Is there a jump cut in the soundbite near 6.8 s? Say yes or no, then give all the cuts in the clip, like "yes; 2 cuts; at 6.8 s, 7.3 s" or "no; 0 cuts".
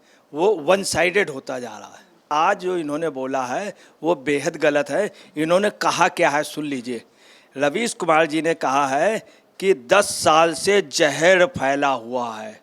no; 1 cut; at 2.3 s